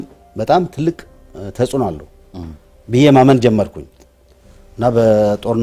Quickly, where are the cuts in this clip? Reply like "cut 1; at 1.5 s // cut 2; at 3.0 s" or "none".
none